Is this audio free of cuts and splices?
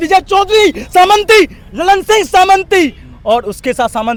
yes; 0 cuts

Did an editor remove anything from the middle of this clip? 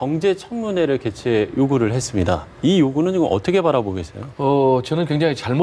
no; 0 cuts

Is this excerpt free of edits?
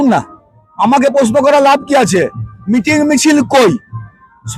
yes; 0 cuts

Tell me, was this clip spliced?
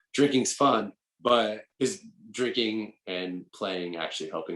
yes; 1 cut; at 3.5 s

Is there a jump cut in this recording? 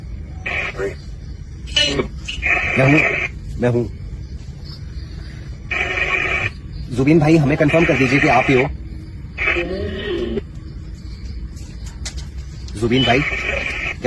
no; 0 cuts

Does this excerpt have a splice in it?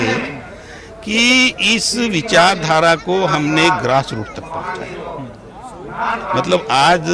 no; 0 cuts

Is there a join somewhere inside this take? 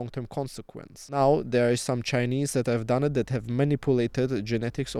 yes; 1 cut; at 1.1 s

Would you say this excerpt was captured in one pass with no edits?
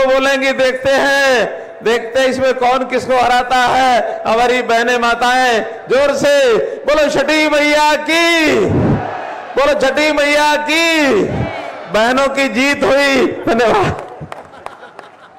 yes; 0 cuts

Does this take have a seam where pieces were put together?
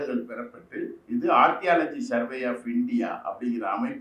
no; 0 cuts

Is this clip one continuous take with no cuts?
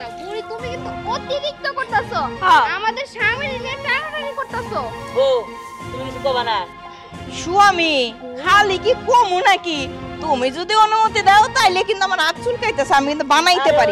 yes; 0 cuts

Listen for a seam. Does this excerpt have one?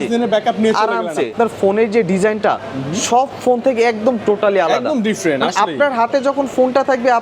yes; 1 cut; at 1.3 s

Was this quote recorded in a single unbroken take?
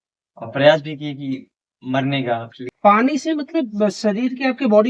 no; 1 cut; at 2.6 s

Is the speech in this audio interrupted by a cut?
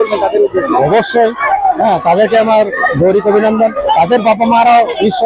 no; 0 cuts

